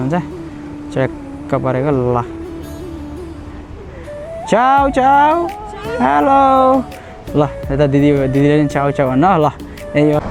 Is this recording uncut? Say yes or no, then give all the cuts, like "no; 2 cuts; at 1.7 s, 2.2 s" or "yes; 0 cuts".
yes; 0 cuts